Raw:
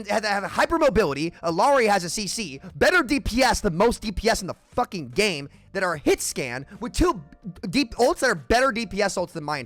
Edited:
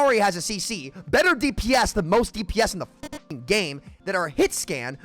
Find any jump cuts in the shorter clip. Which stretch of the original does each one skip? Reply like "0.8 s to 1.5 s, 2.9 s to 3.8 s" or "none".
none